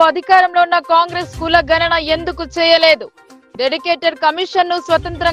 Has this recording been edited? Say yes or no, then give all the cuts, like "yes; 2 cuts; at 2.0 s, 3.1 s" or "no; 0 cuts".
no; 0 cuts